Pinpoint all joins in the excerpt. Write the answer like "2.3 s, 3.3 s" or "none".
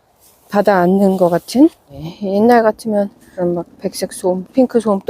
2.1 s, 3.2 s